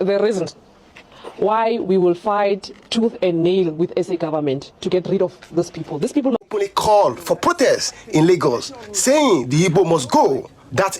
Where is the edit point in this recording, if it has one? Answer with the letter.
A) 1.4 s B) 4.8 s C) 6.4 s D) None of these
C